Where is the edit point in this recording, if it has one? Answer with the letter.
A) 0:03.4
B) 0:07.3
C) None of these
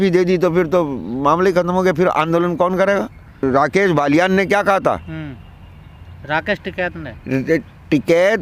A